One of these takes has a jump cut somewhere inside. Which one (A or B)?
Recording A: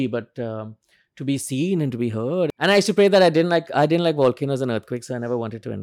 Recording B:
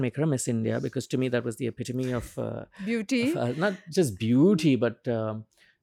A